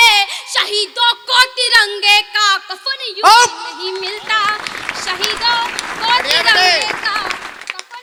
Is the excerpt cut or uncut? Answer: uncut